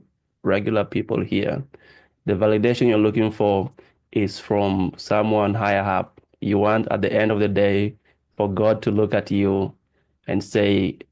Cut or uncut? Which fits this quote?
uncut